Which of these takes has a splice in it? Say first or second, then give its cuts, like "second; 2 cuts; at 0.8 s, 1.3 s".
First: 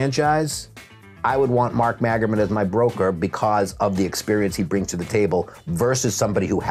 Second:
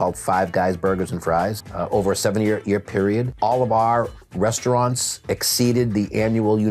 second; 2 cuts; at 1.6 s, 3.3 s